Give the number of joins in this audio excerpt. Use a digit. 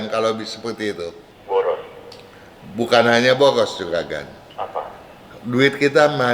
1